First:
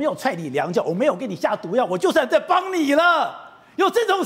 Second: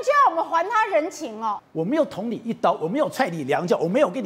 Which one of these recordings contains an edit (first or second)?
second